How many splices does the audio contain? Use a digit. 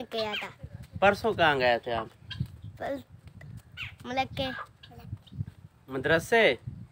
0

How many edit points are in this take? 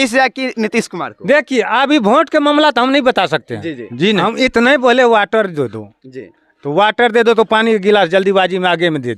1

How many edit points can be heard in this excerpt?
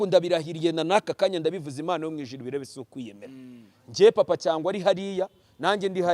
0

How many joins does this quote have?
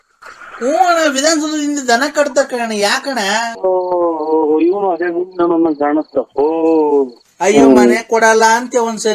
1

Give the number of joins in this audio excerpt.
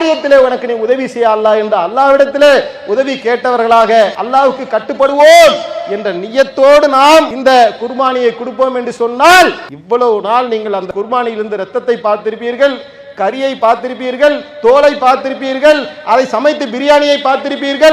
4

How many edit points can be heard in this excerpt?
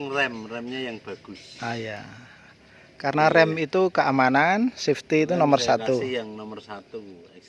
0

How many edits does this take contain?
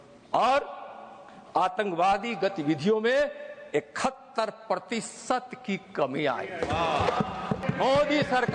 1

